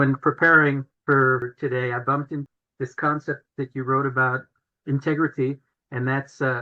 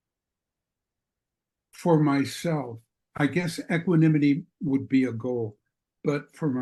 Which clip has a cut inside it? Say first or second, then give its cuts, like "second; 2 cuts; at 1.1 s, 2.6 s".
first; 4 cuts; at 1.2 s, 2.5 s, 3.5 s, 4.7 s